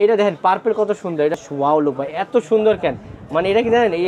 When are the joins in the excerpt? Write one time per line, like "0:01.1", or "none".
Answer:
0:01.4